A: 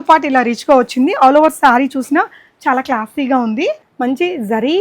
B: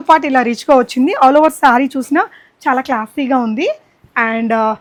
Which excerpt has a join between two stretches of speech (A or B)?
A